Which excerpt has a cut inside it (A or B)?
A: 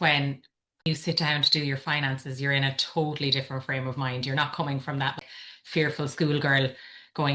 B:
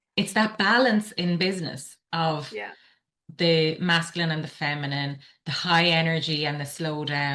A